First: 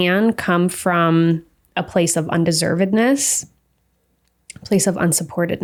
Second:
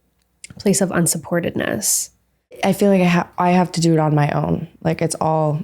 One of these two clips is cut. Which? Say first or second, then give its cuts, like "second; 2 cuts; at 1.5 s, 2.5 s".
second; 1 cut; at 2.6 s